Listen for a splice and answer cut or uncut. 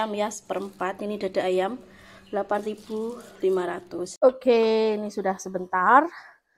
cut